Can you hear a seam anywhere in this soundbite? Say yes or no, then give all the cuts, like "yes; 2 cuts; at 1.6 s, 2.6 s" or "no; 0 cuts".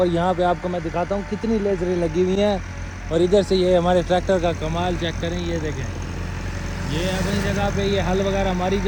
no; 0 cuts